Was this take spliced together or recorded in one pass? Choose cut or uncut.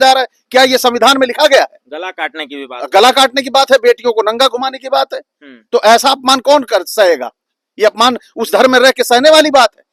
uncut